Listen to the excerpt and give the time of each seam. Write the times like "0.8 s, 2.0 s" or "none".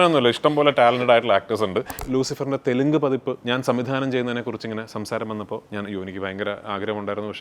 2.0 s, 3.4 s, 5.7 s